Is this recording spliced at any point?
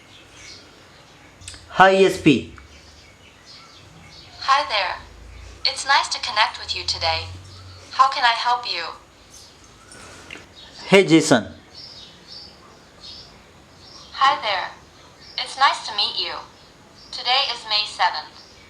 yes; 2 cuts; at 1.4 s, 10.4 s

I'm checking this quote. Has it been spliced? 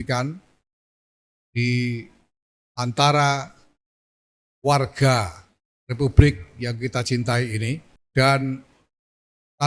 yes; 1 cut; at 7.9 s

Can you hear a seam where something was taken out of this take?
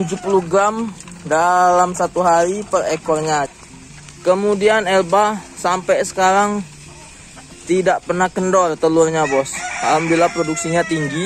yes; 1 cut; at 3.5 s

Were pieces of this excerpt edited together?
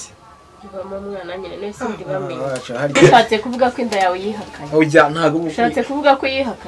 yes; 1 cut; at 3.0 s

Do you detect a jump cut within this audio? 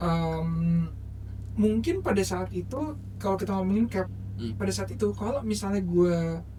no; 0 cuts

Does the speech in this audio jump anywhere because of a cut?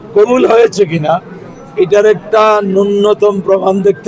no; 0 cuts

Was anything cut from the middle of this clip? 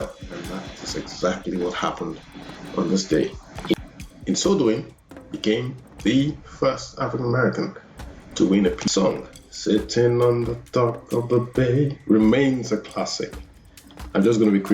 yes; 2 cuts; at 3.7 s, 8.8 s

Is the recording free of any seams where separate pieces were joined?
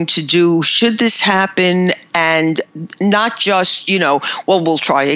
yes; 0 cuts

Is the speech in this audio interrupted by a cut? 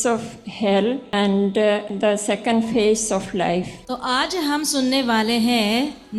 yes; 3 cuts; at 1.0 s, 1.9 s, 3.8 s

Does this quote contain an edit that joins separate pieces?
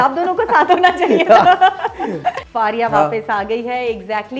yes; 1 cut; at 2.4 s

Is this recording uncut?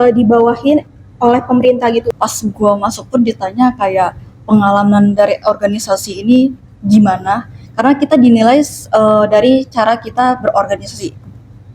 no; 1 cut; at 2.1 s

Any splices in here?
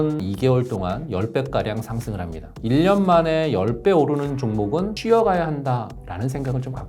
yes; 2 cuts; at 2.6 s, 5.0 s

